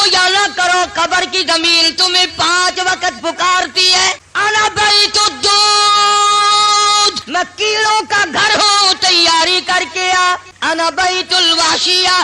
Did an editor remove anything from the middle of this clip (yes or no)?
yes